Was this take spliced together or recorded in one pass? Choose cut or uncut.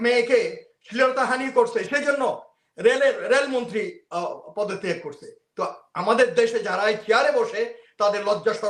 uncut